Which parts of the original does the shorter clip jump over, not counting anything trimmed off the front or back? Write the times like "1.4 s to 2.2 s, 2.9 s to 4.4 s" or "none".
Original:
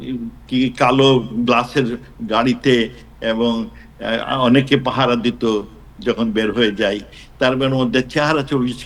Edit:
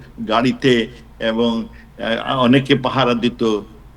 none